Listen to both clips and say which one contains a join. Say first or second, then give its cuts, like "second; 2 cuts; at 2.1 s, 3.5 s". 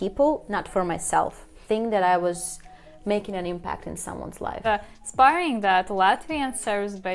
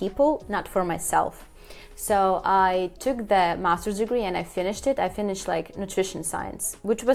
first; 2 cuts; at 1.6 s, 4.7 s